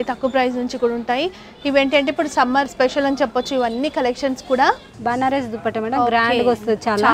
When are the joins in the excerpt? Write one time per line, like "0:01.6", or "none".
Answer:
0:02.7
0:05.0